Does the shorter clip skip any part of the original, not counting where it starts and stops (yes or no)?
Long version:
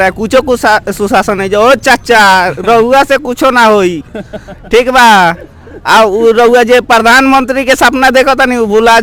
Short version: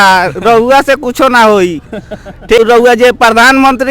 yes